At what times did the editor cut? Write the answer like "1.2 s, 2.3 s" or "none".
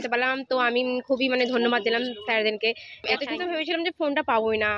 3.1 s